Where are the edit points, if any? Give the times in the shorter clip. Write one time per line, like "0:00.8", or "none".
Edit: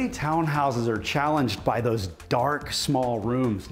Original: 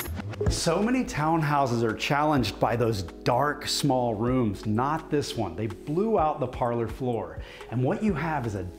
none